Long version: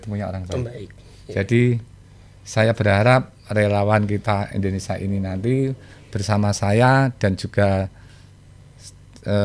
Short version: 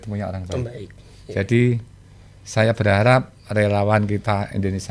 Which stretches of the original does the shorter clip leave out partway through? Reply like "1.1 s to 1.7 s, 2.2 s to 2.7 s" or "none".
none